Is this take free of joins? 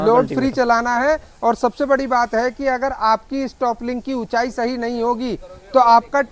yes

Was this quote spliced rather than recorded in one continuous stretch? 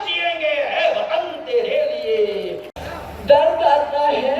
yes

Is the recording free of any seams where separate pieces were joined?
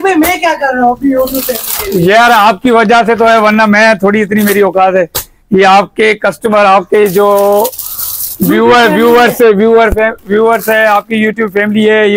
yes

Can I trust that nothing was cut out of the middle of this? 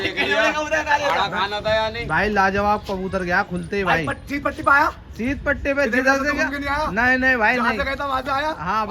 yes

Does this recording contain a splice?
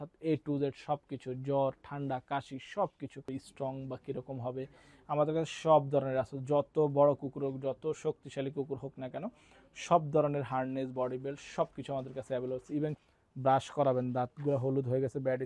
yes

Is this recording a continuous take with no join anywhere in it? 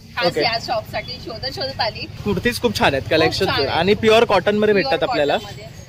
yes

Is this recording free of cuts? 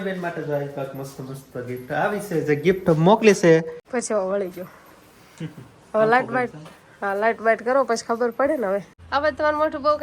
no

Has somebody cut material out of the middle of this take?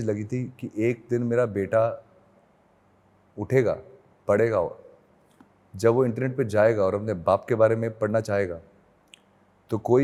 no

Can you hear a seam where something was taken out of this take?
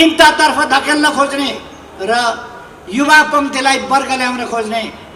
no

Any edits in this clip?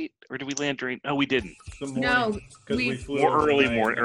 no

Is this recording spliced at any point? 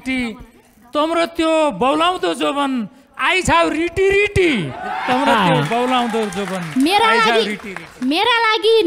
no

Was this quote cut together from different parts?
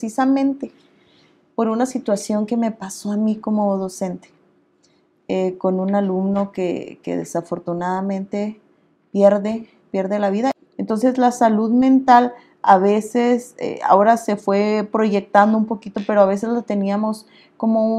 yes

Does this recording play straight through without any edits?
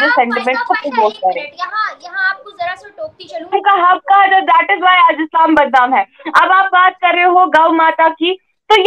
no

